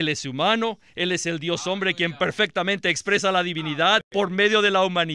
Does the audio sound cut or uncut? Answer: cut